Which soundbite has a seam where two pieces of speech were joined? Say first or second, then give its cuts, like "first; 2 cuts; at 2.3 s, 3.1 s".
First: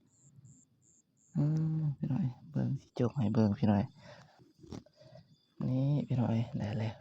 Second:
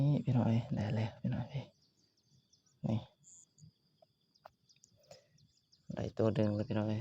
first; 1 cut; at 4.4 s